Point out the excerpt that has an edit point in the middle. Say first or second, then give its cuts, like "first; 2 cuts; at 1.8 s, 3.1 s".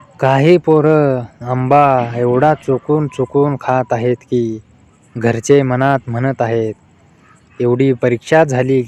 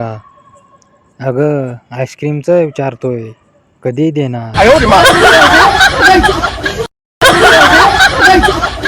second; 1 cut; at 4.1 s